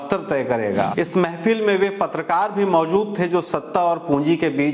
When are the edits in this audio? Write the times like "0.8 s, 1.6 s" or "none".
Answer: 0.9 s